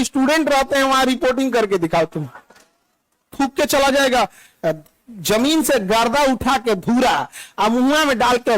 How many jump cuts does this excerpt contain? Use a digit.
1